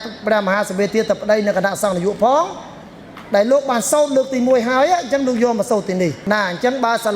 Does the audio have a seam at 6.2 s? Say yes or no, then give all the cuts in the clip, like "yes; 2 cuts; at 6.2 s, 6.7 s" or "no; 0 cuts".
yes; 1 cut; at 6.2 s